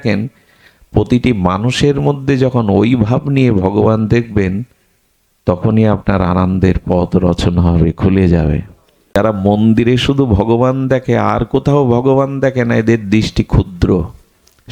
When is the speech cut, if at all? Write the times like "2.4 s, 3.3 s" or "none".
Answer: 9.2 s

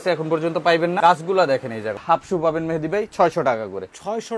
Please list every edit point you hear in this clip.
1.0 s, 2.0 s

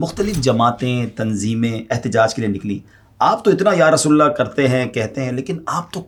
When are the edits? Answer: none

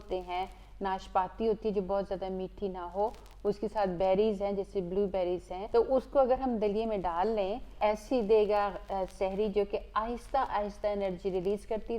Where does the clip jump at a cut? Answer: 5.6 s, 7.7 s

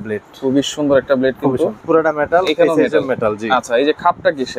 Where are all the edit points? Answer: 1.8 s

